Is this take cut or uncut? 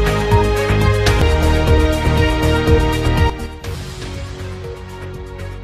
cut